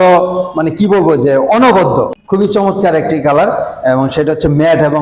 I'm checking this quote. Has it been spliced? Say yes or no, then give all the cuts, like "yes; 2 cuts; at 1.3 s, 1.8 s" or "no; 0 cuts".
yes; 1 cut; at 2.2 s